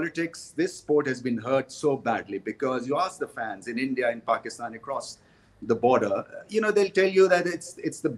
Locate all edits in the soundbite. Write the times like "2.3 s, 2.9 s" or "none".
none